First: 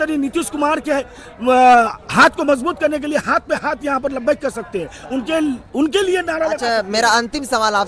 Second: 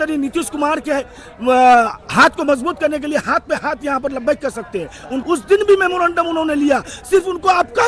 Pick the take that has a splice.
second; 1 cut; at 5.1 s

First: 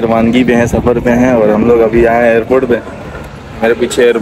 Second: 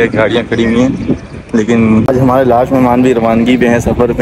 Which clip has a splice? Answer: second; 1 cut; at 2.0 s

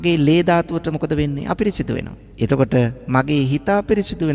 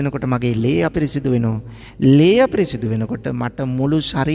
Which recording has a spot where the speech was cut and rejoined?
first; 1 cut; at 2.2 s

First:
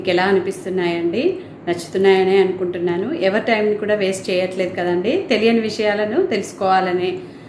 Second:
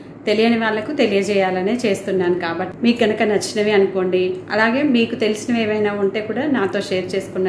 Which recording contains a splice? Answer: second; 1 cut; at 2.6 s

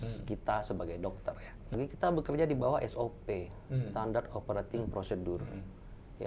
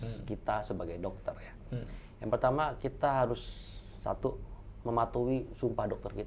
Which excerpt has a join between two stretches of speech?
first; 1 cut; at 1.8 s

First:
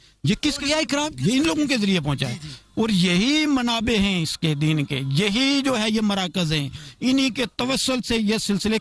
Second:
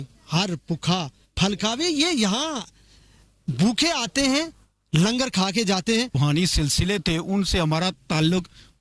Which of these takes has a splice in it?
second; 1 cut; at 6.2 s

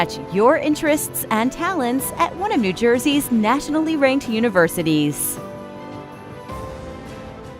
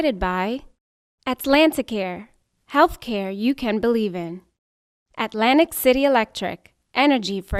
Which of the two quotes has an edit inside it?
first; 1 cut; at 5.2 s

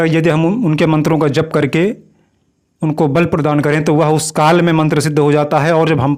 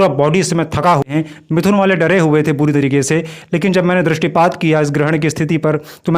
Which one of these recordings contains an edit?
second; 1 cut; at 1.1 s

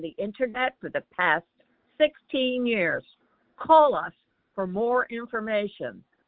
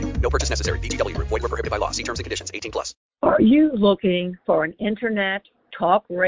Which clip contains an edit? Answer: second; 1 cut; at 3.1 s

